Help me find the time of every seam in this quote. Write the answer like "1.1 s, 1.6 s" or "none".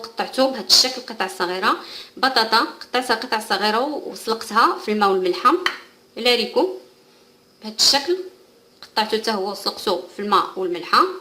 8.6 s